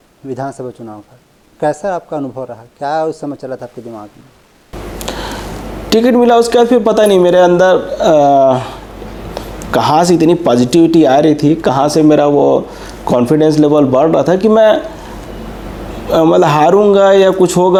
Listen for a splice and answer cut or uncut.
uncut